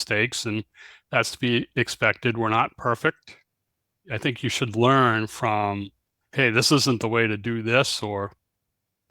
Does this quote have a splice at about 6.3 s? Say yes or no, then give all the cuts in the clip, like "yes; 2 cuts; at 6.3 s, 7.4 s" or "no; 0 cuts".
no; 1 cut; at 4.0 s